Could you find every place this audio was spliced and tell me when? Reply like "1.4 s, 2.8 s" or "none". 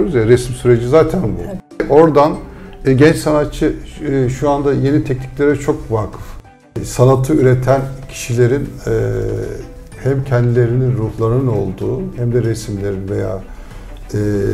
1.9 s, 6.6 s